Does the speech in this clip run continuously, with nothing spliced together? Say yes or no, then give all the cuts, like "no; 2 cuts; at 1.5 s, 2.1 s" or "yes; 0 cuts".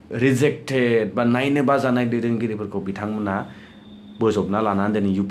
yes; 0 cuts